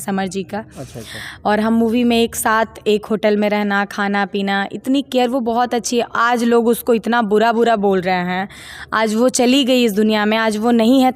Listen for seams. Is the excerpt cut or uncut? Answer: uncut